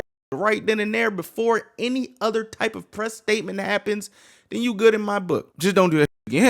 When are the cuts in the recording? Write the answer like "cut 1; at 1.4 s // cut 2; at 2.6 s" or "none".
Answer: cut 1; at 5.5 s